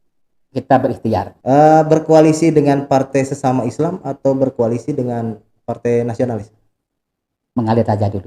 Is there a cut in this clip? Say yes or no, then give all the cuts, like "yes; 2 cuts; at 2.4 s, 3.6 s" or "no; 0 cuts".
yes; 1 cut; at 1.3 s